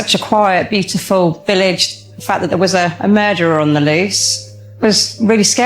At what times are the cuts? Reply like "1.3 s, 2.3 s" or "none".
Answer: 1.6 s, 4.8 s